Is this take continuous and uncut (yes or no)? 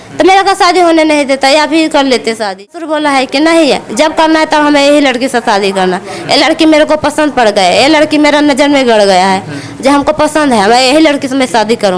no